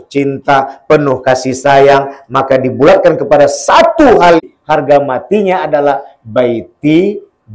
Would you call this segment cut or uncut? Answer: cut